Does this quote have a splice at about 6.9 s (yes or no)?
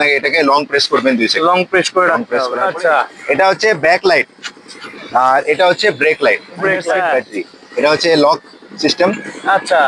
yes